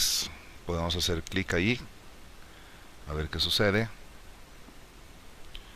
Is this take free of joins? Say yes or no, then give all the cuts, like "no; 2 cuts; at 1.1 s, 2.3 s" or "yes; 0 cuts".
yes; 0 cuts